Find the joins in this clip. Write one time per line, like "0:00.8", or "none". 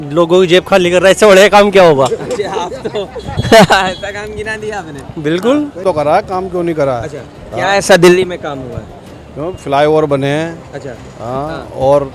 0:05.9